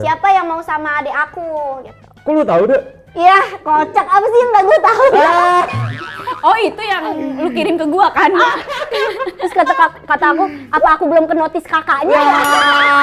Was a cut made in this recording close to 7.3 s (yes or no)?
no